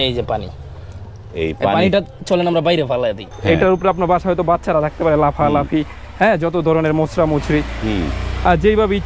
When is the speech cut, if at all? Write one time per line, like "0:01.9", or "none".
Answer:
0:03.3